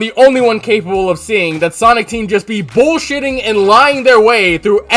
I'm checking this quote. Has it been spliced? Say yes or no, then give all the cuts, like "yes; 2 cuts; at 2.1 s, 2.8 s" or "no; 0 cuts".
no; 0 cuts